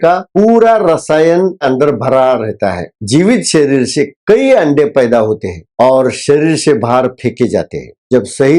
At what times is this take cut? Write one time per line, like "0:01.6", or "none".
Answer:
0:01.6
0:03.0